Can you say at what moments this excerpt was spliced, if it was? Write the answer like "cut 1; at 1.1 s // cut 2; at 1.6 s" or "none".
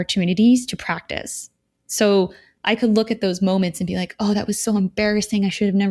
none